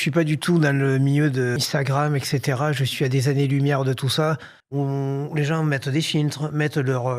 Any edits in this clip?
yes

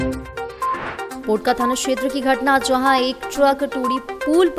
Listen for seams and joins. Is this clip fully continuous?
yes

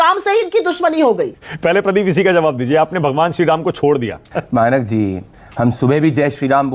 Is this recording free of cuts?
no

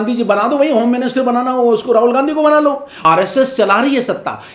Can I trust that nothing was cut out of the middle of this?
no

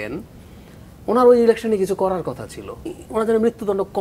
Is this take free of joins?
no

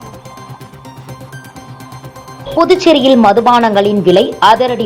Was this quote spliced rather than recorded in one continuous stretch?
no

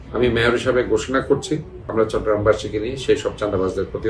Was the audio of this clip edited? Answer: yes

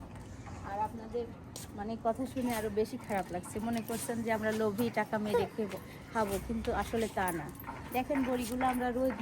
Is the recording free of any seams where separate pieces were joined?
yes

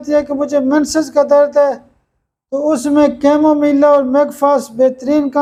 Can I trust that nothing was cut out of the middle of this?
yes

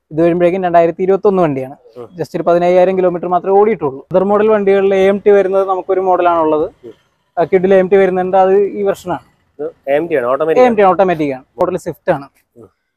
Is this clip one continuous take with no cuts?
no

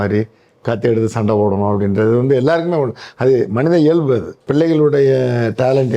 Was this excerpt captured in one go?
no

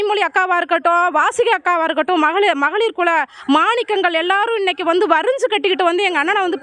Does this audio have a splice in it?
no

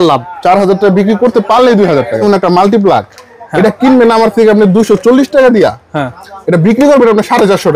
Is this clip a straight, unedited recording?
no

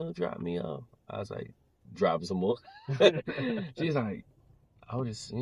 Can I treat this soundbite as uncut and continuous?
yes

